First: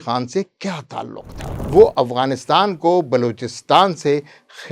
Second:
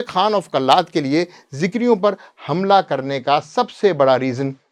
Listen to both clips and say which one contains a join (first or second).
first